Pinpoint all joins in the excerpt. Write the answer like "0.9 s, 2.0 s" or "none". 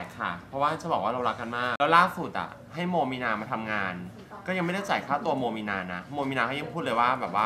1.7 s